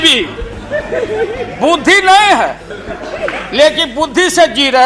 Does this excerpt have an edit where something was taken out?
no; 0 cuts

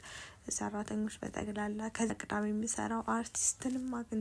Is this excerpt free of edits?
no; 1 cut; at 2.1 s

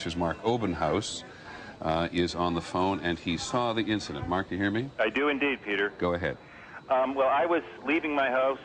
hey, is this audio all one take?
no; 1 cut; at 3.2 s

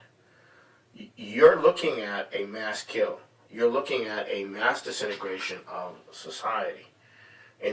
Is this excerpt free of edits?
yes; 0 cuts

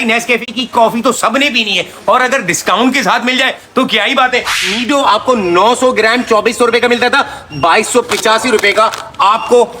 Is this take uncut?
no; 1 cut; at 4.7 s

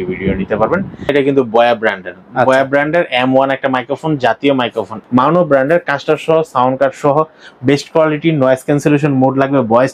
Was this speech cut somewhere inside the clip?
yes; 2 cuts; at 1.1 s, 4.9 s

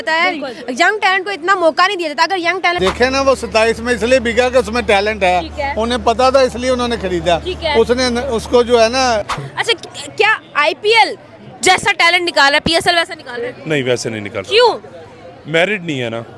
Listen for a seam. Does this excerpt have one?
yes; 2 cuts; at 2.8 s, 9.3 s

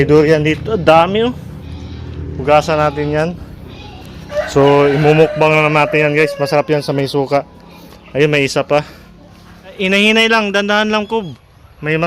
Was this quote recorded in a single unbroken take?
no; 1 cut; at 9.8 s

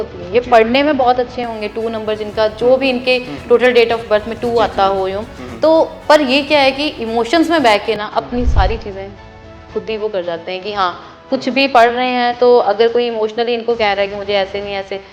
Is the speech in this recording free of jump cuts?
yes; 0 cuts

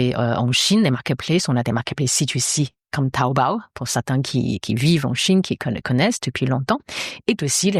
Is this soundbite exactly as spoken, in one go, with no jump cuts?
yes; 0 cuts

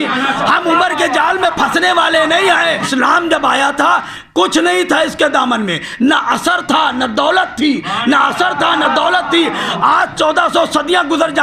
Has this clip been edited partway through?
yes; 1 cut; at 2.9 s

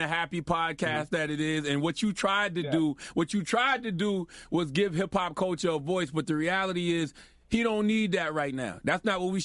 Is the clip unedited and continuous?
yes; 0 cuts

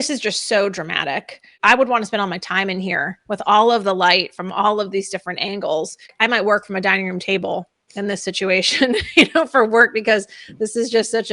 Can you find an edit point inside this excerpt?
yes; 2 cuts; at 1.5 s, 6.1 s

